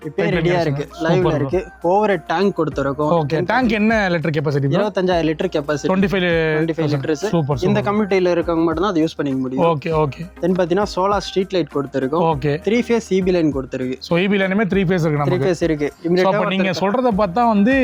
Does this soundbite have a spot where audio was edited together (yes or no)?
no